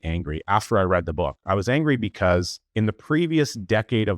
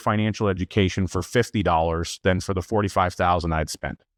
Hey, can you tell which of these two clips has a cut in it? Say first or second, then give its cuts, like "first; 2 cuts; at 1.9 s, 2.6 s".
first; 1 cut; at 2.6 s